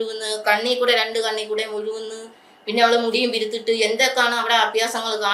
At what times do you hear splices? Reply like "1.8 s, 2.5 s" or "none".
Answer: none